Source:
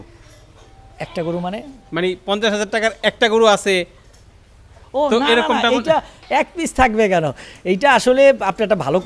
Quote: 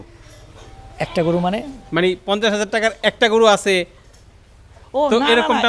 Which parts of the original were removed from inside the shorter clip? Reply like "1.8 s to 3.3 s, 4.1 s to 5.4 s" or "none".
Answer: none

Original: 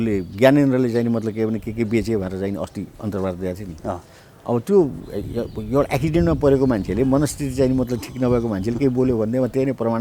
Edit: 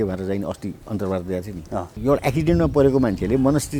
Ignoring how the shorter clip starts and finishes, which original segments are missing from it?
4.0 s to 5.6 s

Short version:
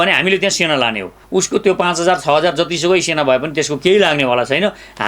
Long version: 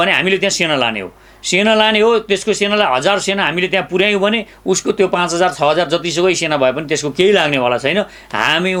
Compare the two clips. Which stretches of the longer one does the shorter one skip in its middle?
1.2 s to 4.5 s

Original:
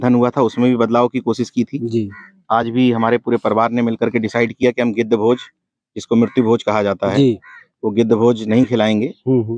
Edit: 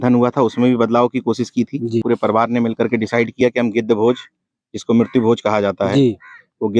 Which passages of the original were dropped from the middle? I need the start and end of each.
2.0 s to 3.3 s

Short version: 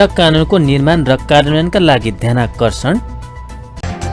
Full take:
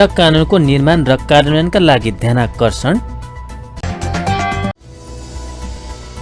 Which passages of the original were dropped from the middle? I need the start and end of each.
none

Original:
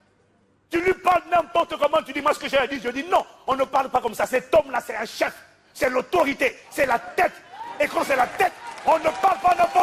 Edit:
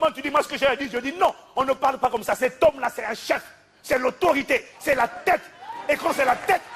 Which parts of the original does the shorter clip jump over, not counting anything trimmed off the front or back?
none

